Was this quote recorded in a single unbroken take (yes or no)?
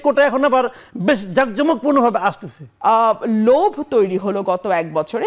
no